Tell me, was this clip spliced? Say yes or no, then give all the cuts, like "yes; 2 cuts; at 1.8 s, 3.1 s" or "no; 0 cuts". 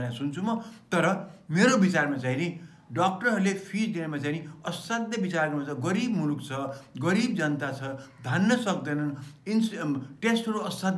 no; 0 cuts